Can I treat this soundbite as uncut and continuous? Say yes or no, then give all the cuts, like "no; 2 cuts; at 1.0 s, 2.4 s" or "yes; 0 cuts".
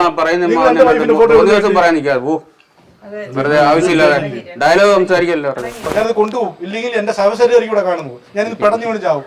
no; 1 cut; at 5.8 s